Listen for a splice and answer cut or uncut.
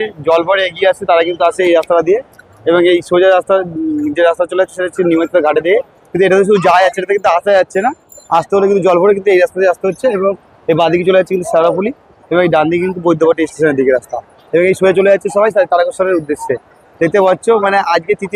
uncut